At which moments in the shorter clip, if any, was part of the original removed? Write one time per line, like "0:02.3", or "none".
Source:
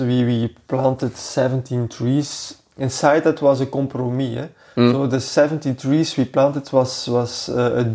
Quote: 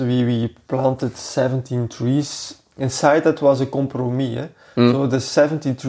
none